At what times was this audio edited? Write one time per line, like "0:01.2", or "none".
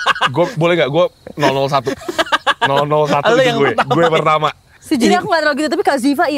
0:04.8